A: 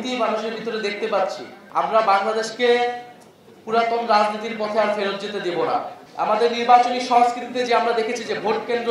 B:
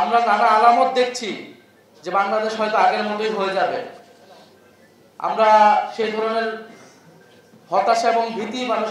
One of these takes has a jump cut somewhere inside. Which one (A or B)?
A